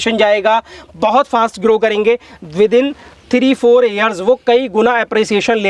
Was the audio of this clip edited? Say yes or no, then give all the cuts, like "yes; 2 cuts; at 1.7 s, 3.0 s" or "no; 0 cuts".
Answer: no; 0 cuts